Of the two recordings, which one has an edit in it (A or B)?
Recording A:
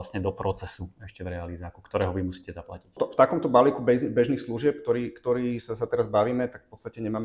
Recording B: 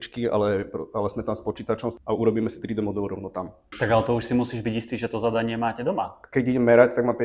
B